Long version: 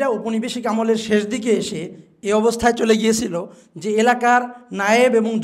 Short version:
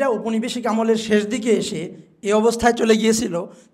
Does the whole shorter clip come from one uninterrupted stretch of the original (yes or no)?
yes